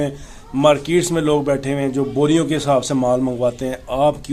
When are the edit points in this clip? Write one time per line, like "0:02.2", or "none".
none